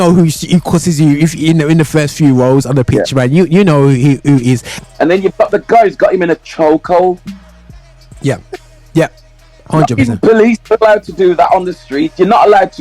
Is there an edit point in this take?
yes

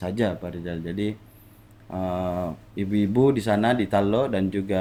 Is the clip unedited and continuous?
yes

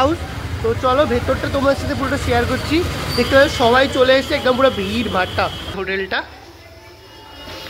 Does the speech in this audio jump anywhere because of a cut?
yes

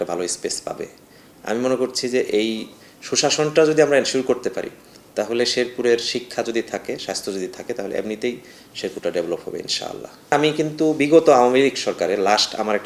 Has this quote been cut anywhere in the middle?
yes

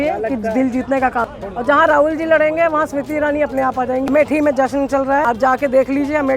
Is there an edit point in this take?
yes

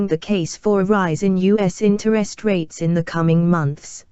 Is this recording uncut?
no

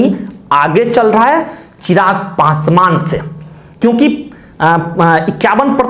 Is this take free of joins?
yes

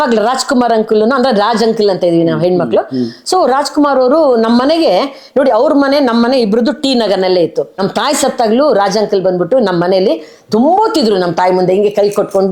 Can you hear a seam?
yes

